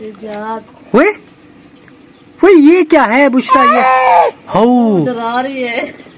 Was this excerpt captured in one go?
yes; 0 cuts

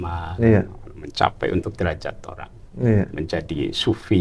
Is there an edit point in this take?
no; 0 cuts

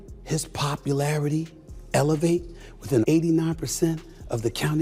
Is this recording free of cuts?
yes; 0 cuts

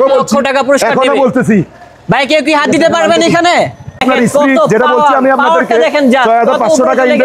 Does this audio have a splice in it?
no; 0 cuts

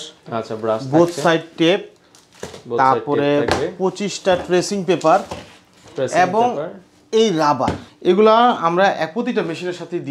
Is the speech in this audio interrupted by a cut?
yes; 1 cut; at 7.9 s

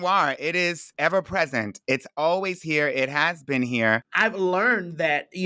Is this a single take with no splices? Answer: no; 2 cuts; at 0.9 s, 4.1 s

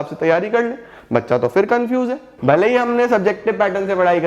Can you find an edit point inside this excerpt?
yes; 1 cut; at 2.3 s

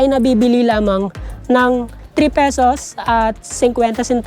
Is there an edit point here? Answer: no; 0 cuts

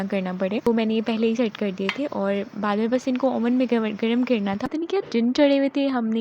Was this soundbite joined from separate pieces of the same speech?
yes; 1 cut; at 4.6 s

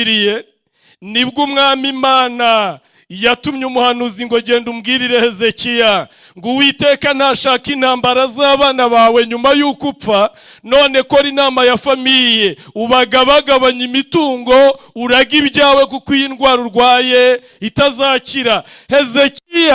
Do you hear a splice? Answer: no; 0 cuts

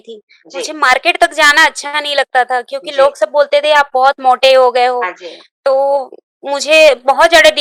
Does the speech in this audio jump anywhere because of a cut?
no; 0 cuts

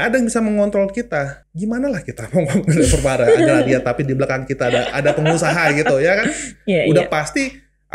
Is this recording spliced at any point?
yes; 1 cut; at 1.4 s

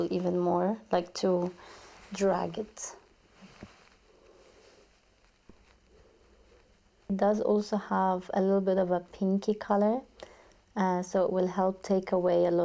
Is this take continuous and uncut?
no; 2 cuts; at 5.5 s, 7.1 s

